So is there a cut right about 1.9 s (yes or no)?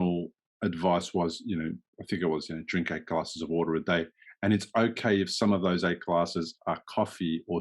yes